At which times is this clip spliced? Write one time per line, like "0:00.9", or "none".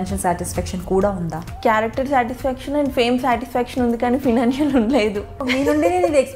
0:01.4
0:05.5